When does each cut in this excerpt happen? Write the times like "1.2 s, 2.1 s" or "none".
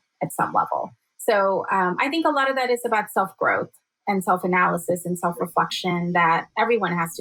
none